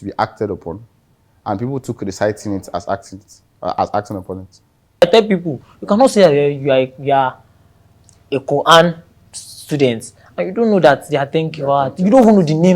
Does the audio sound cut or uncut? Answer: cut